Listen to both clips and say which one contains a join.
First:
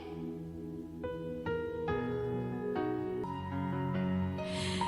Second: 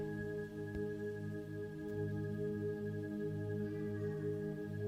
first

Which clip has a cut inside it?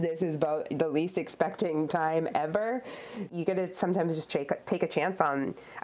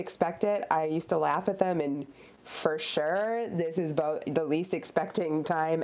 first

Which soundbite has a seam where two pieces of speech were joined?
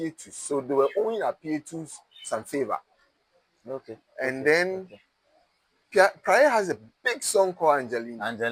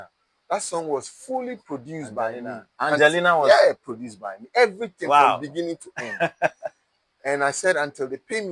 second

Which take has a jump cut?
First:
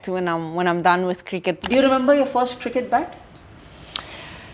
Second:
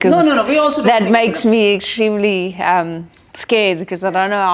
first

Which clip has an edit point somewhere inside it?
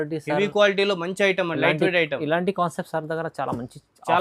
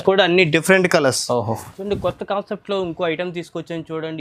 second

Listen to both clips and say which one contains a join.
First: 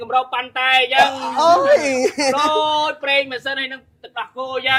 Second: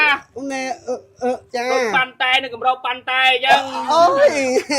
second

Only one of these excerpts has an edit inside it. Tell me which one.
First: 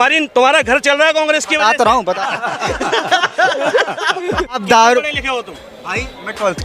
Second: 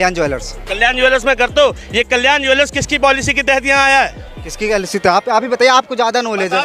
first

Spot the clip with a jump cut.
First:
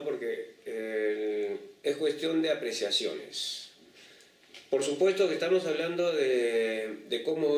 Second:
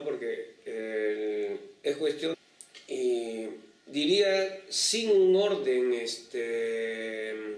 first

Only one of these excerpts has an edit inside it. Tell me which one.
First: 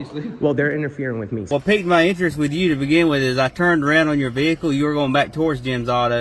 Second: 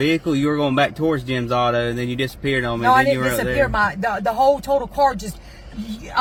first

